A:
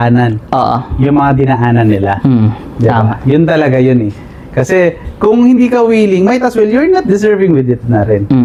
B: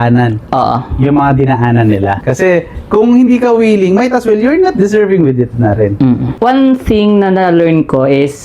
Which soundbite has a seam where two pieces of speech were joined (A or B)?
B